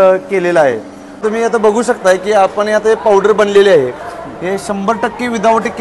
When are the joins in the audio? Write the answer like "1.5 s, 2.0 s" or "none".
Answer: 1.1 s

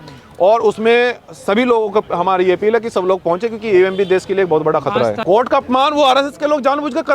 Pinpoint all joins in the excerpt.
5.2 s

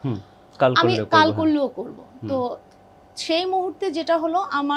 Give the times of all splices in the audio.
none

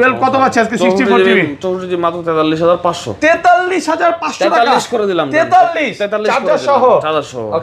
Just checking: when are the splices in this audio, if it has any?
none

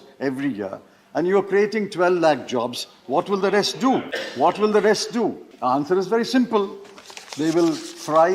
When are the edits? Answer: 4.2 s, 5.5 s

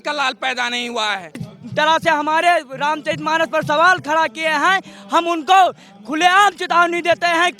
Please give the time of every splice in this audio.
1.5 s

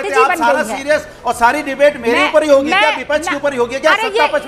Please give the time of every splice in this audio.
none

